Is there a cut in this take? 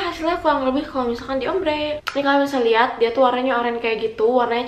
yes; 1 cut; at 2.0 s

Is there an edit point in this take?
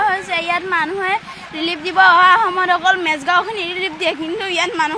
no; 0 cuts

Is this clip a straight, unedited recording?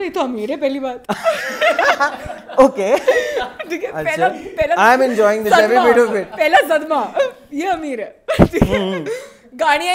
yes; 0 cuts

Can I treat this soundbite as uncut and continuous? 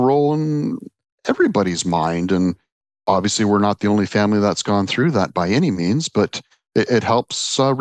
yes; 0 cuts

